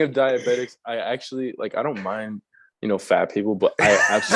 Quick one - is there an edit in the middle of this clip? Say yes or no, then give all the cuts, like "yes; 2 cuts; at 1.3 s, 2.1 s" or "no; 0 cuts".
no; 0 cuts